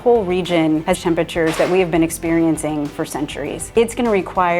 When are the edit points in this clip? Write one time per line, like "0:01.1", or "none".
0:01.0
0:03.7